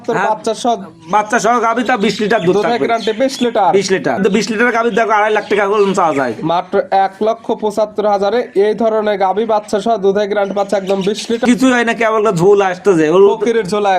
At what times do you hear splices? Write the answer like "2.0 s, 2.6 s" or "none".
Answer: 4.2 s, 11.4 s